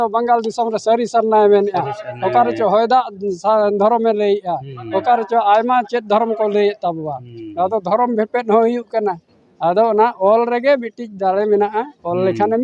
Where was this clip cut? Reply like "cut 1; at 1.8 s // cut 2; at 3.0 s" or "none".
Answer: none